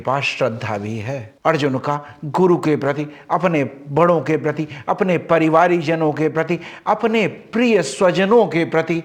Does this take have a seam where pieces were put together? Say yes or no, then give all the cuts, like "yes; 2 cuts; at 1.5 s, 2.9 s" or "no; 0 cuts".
no; 0 cuts